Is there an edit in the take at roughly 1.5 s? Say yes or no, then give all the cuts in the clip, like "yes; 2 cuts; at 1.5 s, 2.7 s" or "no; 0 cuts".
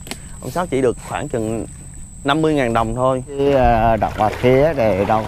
no; 1 cut; at 3.4 s